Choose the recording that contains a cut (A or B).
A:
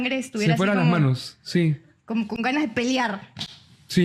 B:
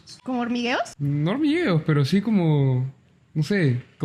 B